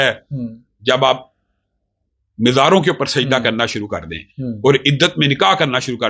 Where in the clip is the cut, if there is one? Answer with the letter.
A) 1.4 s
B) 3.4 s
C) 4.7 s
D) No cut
D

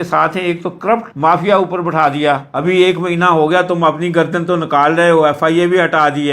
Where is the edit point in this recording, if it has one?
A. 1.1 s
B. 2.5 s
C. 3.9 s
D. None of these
B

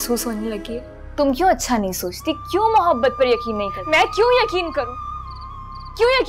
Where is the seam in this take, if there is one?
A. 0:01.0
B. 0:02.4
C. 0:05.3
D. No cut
A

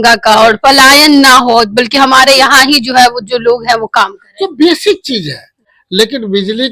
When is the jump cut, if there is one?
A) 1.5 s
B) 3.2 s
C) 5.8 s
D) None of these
C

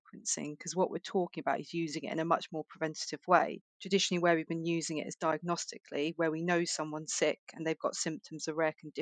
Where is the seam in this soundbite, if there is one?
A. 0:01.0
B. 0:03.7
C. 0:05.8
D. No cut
B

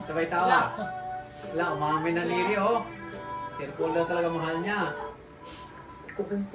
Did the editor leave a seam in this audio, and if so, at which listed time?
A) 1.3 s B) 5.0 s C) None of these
C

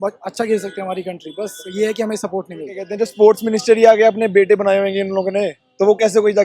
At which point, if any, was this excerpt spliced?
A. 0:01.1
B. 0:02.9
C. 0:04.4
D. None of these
B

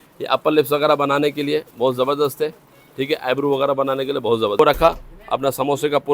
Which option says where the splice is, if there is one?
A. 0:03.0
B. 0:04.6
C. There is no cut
B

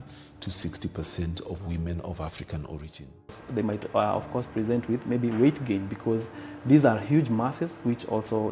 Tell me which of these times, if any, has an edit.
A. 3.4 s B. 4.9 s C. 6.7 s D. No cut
A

